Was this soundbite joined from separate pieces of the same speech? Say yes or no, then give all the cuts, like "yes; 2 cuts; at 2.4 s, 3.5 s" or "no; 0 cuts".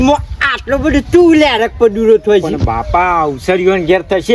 no; 0 cuts